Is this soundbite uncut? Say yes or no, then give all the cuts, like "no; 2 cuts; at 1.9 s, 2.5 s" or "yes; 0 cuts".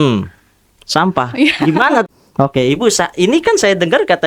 no; 1 cut; at 2.1 s